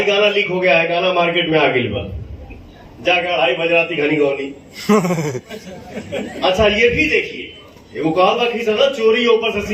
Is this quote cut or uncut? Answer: uncut